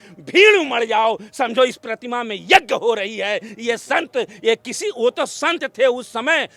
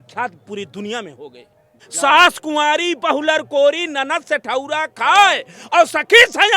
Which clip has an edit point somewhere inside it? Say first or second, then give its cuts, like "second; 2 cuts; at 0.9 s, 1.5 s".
second; 1 cut; at 1.8 s